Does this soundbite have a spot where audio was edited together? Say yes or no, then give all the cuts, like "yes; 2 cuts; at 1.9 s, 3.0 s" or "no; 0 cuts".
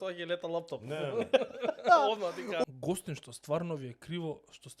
yes; 1 cut; at 2.6 s